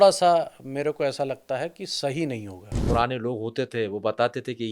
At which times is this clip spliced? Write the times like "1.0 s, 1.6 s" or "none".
2.8 s